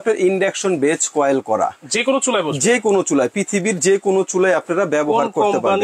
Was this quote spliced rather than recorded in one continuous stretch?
no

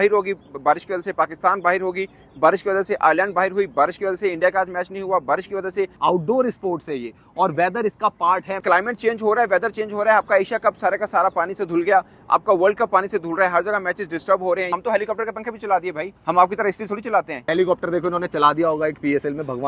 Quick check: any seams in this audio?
yes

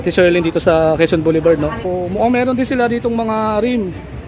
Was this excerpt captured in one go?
no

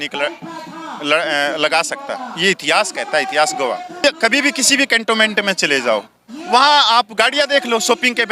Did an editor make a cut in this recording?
yes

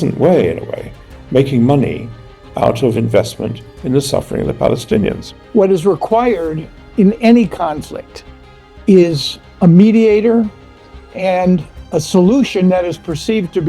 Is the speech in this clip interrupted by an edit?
yes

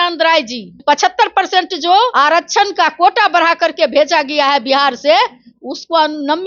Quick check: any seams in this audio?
yes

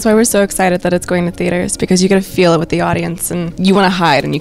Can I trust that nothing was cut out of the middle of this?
no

